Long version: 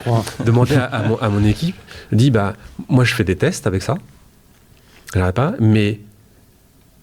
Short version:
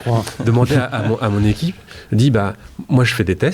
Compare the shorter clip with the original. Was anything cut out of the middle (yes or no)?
no